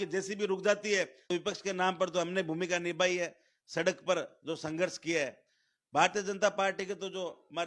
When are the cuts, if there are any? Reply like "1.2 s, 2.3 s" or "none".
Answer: 1.2 s